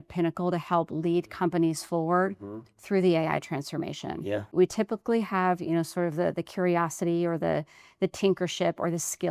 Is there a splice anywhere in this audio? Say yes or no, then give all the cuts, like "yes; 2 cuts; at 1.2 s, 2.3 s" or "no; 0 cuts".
yes; 1 cut; at 4.5 s